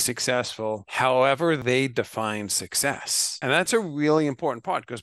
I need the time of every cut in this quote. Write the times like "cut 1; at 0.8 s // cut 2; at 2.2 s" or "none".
cut 1; at 0.9 s // cut 2; at 1.6 s // cut 3; at 3.7 s